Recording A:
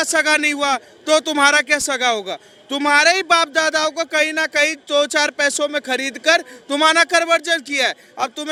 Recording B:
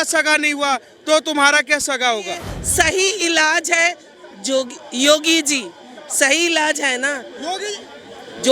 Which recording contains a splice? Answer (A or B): B